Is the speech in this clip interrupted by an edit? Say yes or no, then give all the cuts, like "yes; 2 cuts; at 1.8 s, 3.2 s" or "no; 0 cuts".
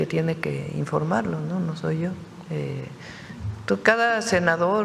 no; 0 cuts